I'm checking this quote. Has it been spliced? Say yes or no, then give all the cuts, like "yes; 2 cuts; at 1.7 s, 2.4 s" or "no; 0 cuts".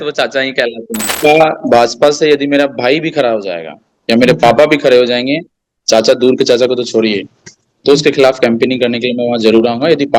yes; 1 cut; at 1.1 s